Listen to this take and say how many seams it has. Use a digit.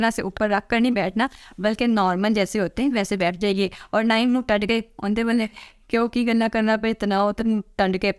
0